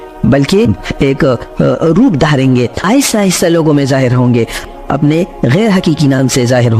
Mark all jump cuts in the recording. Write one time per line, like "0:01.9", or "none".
0:02.8
0:04.7